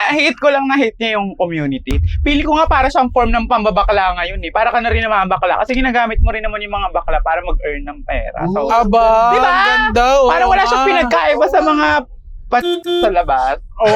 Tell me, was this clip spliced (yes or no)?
yes